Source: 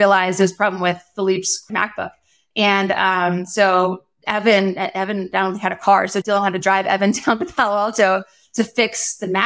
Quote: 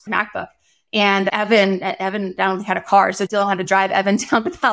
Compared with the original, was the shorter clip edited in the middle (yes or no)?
yes